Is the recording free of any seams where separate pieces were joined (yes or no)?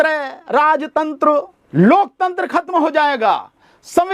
no